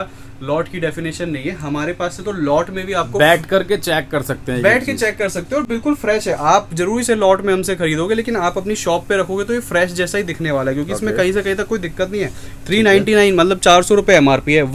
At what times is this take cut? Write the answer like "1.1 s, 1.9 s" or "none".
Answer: none